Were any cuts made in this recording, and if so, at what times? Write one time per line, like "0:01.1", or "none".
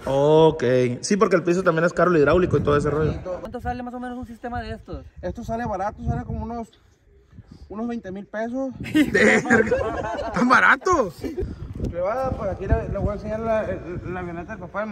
0:03.5
0:11.4